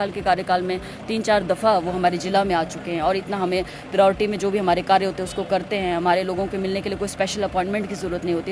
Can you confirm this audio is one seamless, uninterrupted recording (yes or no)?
yes